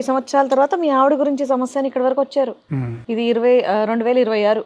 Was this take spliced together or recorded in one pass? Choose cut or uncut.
uncut